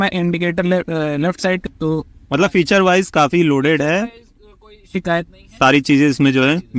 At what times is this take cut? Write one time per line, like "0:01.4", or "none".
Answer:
0:01.6